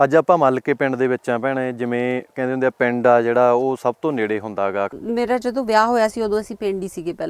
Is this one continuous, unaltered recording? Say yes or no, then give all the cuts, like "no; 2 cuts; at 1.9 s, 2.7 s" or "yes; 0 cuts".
no; 1 cut; at 4.9 s